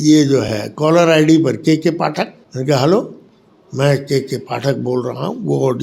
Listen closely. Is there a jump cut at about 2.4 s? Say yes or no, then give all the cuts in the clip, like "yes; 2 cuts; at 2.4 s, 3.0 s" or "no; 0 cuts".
yes; 1 cut; at 2.4 s